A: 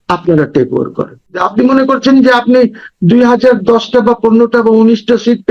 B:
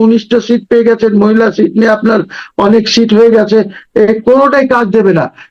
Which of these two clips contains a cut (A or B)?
A